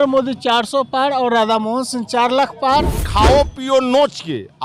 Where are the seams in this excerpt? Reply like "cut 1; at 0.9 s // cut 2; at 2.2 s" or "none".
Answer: cut 1; at 3.0 s

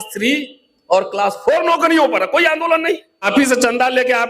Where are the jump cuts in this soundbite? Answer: cut 1; at 3.2 s

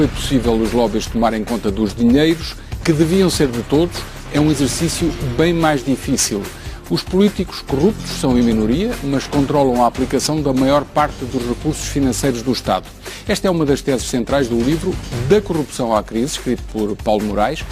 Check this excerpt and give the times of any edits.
cut 1; at 6.0 s

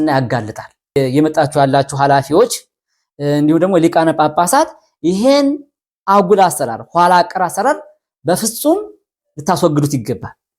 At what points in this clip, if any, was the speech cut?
cut 1; at 1.0 s

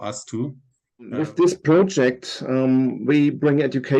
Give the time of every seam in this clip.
cut 1; at 1.2 s

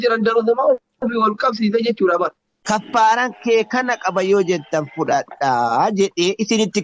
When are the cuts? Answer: cut 1; at 2.5 s

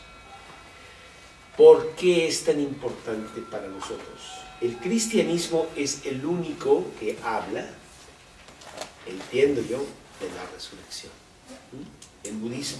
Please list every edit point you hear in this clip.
cut 1; at 8.1 s

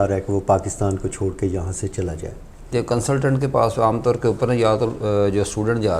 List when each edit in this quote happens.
cut 1; at 2.7 s

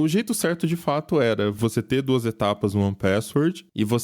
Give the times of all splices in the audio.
cut 1; at 1.6 s

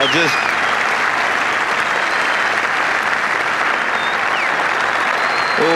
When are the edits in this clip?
cut 1; at 1.3 s // cut 2; at 2.4 s // cut 3; at 4.0 s

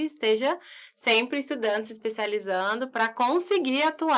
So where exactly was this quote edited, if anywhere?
none

